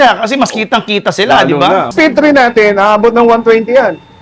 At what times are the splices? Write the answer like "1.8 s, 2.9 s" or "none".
1.9 s

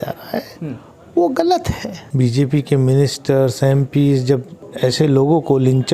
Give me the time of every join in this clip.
2.0 s, 4.6 s

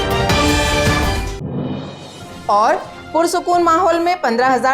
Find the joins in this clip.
1.0 s, 1.9 s

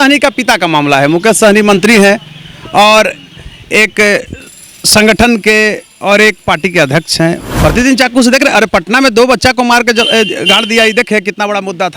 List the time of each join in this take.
7.5 s

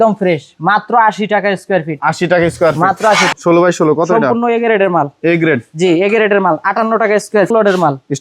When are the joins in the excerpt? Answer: 3.3 s, 7.5 s

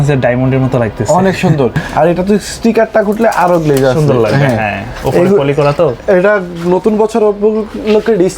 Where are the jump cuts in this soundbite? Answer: none

